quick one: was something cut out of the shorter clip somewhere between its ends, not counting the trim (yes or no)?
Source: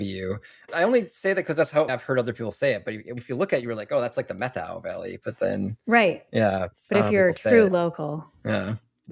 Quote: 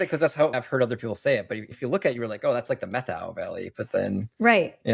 yes